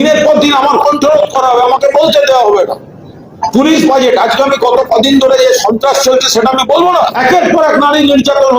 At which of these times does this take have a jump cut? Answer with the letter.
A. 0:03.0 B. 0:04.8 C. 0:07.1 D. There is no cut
C